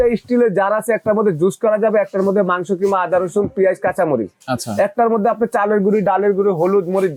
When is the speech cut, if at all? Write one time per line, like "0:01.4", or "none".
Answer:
none